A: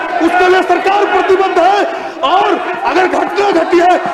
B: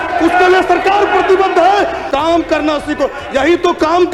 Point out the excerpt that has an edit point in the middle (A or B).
B